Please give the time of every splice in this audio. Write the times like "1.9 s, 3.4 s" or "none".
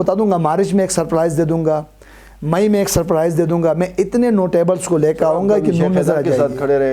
none